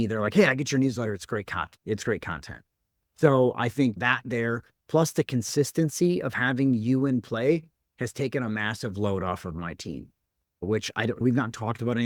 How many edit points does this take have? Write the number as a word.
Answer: zero